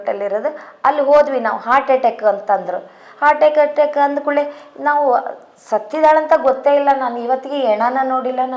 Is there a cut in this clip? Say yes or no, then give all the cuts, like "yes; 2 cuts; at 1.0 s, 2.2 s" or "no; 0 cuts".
no; 0 cuts